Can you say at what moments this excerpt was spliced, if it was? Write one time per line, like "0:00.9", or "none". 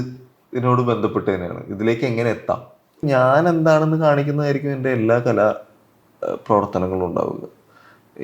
0:03.0